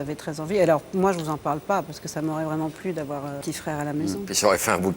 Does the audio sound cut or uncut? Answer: cut